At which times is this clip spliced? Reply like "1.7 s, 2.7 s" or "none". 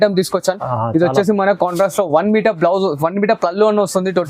none